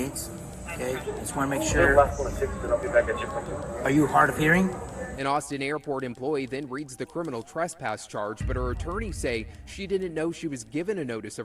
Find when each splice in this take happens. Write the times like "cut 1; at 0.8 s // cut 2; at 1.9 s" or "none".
none